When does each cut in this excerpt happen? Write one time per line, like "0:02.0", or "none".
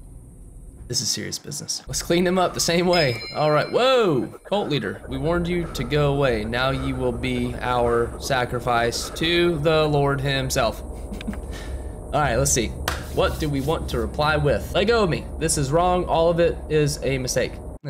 none